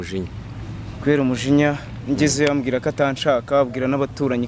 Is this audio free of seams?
yes; 0 cuts

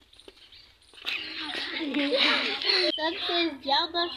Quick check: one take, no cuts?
no; 1 cut; at 2.9 s

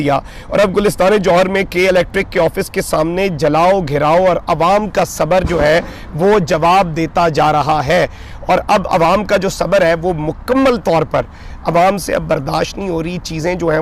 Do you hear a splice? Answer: no; 0 cuts

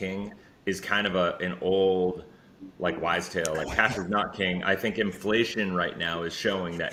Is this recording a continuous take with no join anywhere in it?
yes; 0 cuts

